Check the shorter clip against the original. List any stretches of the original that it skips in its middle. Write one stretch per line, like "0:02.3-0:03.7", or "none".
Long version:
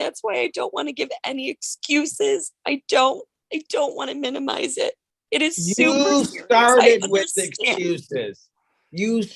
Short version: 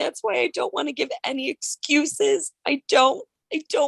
none